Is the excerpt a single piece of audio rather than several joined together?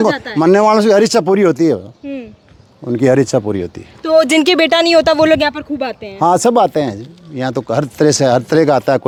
yes; 0 cuts

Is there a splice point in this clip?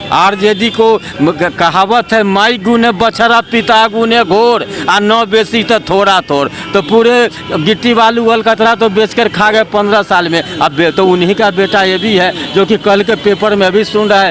no; 0 cuts

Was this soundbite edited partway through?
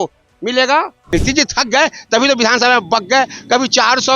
yes; 1 cut; at 1.0 s

